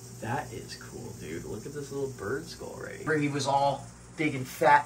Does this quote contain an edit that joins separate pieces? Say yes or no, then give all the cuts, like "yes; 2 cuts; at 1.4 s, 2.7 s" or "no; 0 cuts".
yes; 1 cut; at 3.1 s